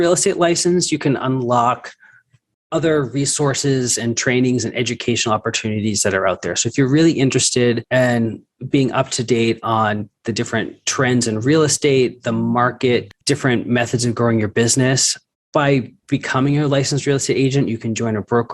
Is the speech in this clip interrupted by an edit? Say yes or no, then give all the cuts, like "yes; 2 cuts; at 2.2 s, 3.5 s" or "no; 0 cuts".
yes; 3 cuts; at 7.8 s, 13.1 s, 16.0 s